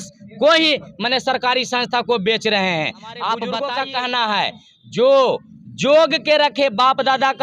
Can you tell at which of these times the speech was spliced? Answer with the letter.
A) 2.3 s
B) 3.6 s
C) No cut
B